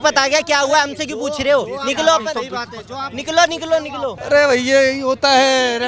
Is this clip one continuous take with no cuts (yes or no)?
no